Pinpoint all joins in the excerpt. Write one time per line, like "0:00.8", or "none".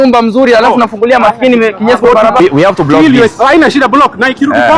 0:02.4